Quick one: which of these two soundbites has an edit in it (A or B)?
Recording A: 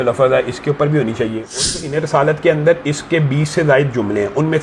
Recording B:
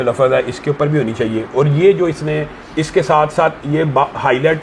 A